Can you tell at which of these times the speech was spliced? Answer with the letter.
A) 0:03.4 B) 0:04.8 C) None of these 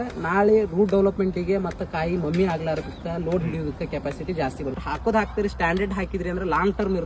B